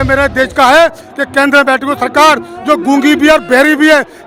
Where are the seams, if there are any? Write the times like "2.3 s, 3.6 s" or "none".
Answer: none